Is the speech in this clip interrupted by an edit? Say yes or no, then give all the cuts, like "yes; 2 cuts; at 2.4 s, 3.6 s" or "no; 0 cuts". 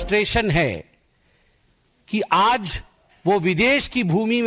no; 0 cuts